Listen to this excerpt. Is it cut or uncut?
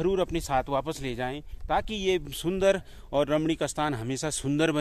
uncut